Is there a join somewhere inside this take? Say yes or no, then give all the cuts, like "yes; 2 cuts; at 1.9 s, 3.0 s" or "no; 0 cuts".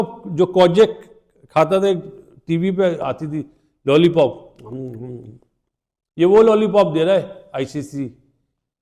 no; 0 cuts